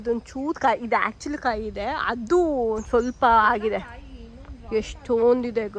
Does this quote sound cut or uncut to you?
uncut